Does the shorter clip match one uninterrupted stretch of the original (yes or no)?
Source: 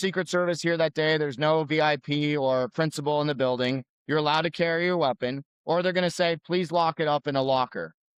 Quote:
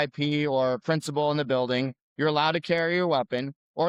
yes